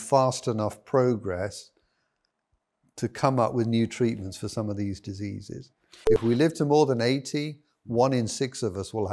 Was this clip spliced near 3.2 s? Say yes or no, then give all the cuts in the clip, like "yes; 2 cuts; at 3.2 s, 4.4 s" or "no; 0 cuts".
no; 1 cut; at 5.9 s